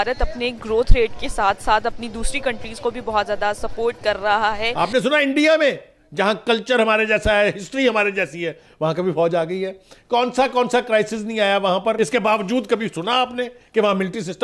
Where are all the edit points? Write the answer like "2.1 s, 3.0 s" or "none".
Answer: 4.7 s, 12.0 s